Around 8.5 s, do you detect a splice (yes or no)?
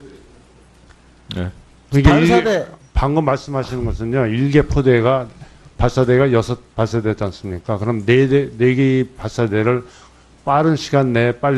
yes